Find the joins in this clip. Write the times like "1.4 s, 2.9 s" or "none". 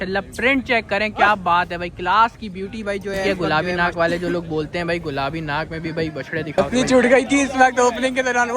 3.2 s, 6.4 s